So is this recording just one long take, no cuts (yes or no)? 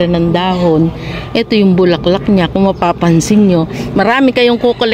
yes